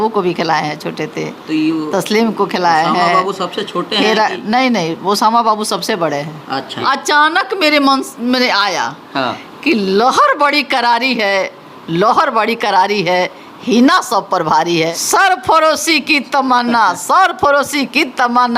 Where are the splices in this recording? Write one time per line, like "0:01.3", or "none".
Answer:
0:06.7
0:15.0